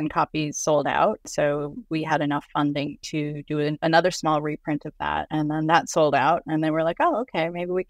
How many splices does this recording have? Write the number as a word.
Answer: three